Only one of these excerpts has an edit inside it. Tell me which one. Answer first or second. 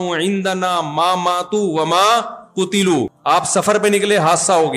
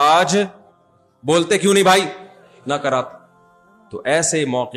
second